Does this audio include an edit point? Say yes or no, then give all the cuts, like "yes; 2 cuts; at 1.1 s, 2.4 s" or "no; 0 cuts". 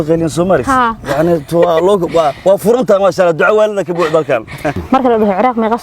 yes; 1 cut; at 4.8 s